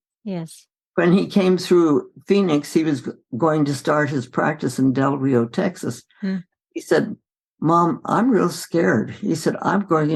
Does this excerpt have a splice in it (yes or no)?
no